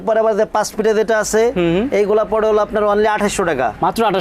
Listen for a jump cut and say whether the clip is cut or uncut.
uncut